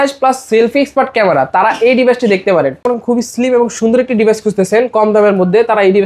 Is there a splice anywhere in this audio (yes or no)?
yes